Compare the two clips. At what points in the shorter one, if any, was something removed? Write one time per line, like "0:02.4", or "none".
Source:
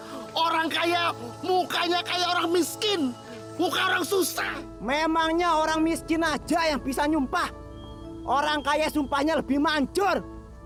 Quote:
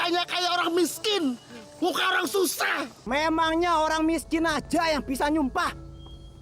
none